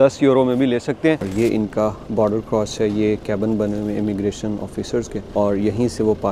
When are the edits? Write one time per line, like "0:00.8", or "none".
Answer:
0:01.3
0:05.2